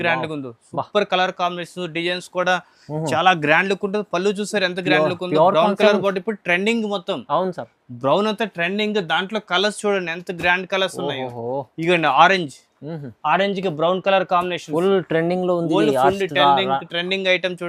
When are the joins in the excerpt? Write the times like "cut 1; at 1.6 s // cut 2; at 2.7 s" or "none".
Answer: none